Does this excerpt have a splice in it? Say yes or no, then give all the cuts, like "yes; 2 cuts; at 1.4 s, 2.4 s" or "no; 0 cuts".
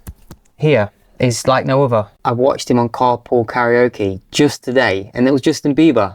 yes; 1 cut; at 2.1 s